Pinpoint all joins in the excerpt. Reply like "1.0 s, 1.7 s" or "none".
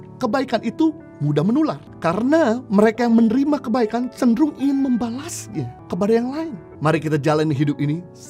6.6 s